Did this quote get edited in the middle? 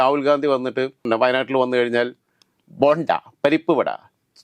yes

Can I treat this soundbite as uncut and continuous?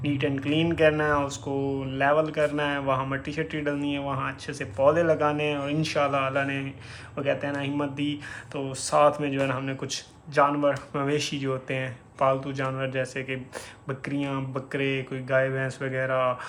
yes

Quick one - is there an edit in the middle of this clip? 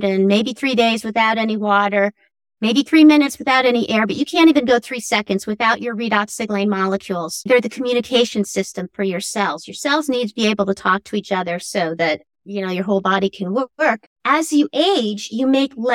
yes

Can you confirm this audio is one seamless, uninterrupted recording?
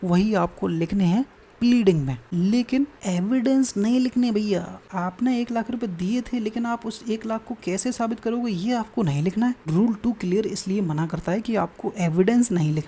no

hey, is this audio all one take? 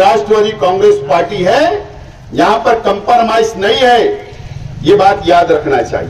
yes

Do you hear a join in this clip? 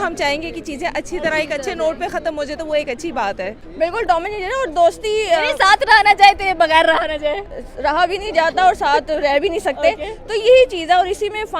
yes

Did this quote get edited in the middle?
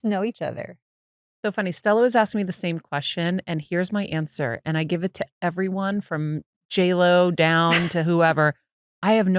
no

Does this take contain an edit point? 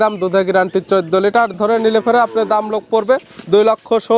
yes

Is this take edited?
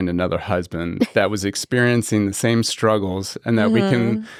no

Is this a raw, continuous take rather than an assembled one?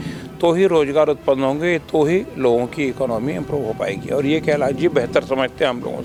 yes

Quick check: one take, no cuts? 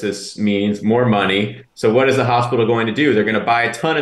yes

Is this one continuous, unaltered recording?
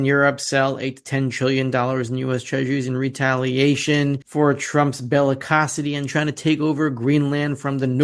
yes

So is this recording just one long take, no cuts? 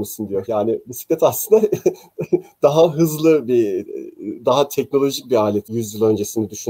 no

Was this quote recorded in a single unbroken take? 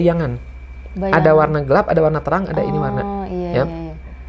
yes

